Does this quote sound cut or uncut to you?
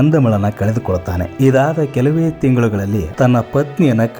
cut